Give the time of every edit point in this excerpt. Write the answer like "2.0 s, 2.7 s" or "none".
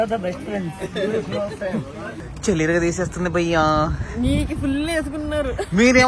2.2 s